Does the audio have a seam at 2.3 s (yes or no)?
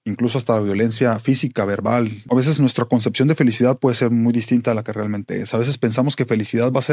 yes